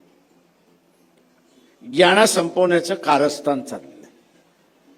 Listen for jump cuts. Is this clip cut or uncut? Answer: uncut